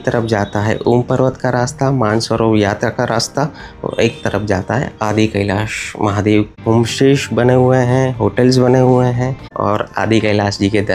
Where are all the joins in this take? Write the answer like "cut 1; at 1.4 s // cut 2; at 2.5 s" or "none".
cut 1; at 6.5 s // cut 2; at 9.4 s